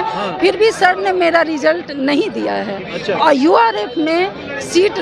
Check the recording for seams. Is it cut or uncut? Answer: uncut